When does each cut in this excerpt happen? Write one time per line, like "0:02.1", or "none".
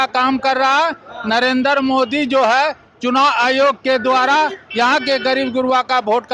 none